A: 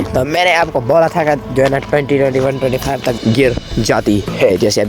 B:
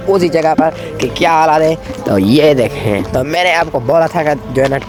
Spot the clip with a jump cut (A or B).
A